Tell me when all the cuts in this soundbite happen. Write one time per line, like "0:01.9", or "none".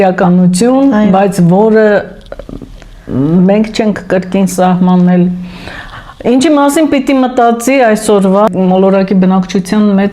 0:08.5

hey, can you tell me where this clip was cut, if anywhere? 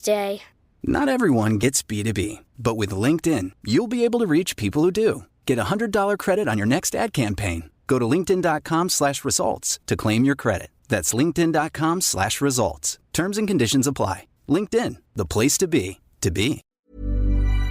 0:16.8

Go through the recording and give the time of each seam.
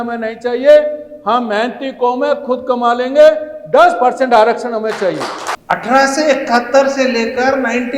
0:05.5

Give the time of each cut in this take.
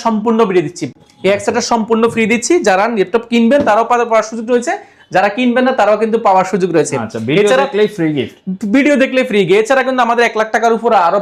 none

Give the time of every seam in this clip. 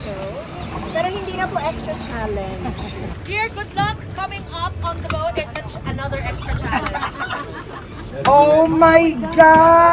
0:03.2

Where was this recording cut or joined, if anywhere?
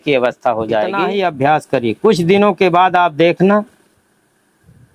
0:01.0

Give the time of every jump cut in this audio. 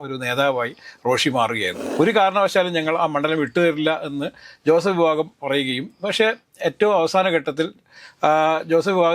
0:01.8

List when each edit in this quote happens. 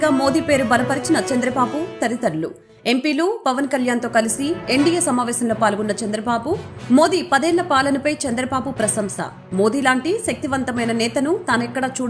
none

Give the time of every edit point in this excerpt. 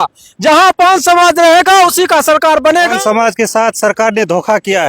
0:02.9

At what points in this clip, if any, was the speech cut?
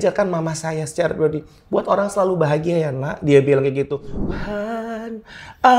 0:04.2

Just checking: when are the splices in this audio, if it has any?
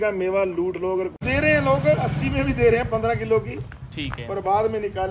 0:01.2

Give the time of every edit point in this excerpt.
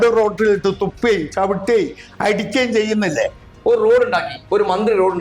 0:03.5

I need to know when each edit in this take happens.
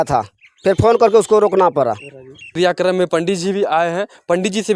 0:02.5

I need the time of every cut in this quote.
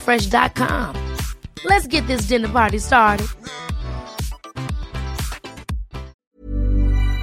0:06.2

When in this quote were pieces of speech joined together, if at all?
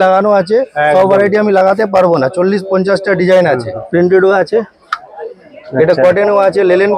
0:03.8

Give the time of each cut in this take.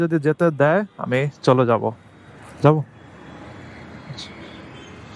none

